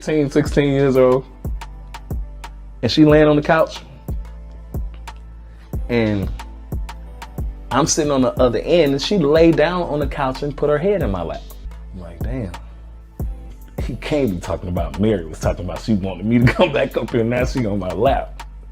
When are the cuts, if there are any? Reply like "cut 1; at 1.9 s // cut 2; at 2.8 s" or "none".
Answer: cut 1; at 11.8 s // cut 2; at 13.5 s